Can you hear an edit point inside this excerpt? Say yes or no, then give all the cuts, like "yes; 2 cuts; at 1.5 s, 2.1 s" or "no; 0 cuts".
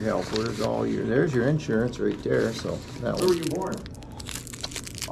yes; 1 cut; at 3.2 s